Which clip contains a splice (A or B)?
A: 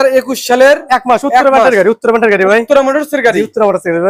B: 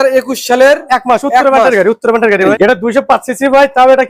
B